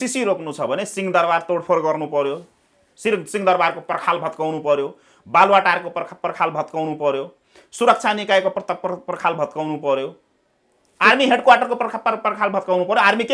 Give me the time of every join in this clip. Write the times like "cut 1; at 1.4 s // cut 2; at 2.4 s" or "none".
none